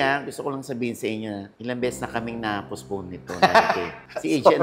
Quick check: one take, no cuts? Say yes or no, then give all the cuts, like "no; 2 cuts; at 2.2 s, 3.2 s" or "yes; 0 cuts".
yes; 0 cuts